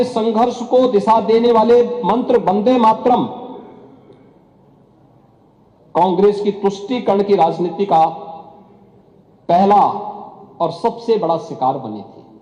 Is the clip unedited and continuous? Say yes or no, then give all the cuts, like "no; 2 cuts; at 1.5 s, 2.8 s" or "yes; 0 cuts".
yes; 0 cuts